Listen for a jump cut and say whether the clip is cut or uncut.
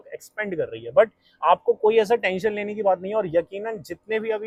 uncut